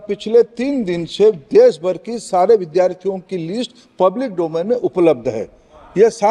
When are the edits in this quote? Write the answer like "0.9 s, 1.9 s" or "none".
none